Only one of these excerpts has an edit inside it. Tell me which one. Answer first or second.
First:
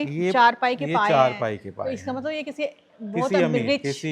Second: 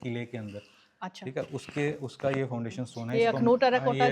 second